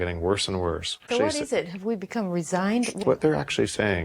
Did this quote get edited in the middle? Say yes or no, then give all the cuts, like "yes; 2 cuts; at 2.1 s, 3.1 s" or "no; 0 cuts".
yes; 2 cuts; at 1.1 s, 3.0 s